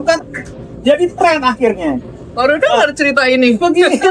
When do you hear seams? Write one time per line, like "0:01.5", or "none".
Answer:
none